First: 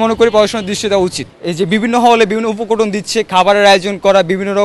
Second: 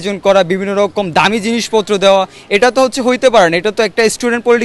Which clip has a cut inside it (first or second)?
first